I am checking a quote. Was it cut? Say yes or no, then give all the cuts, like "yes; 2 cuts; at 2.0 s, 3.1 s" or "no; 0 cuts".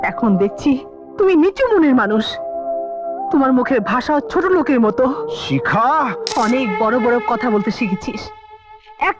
yes; 1 cut; at 6.2 s